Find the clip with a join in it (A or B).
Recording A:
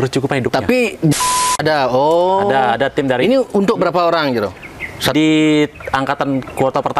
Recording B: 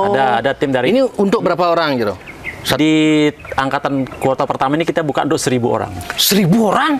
A